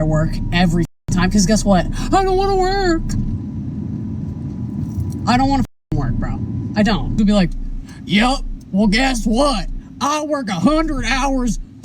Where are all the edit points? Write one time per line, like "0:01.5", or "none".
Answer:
0:07.1